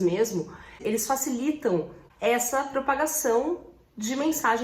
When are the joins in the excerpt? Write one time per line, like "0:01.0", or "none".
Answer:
0:00.8
0:02.0